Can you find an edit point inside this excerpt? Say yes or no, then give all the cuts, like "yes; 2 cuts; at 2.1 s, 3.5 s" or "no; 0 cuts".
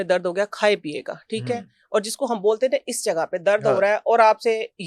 no; 0 cuts